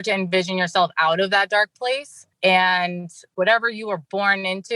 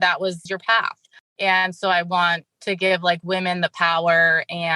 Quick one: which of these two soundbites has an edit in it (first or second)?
first